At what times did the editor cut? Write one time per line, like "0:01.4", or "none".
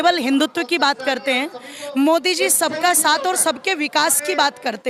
none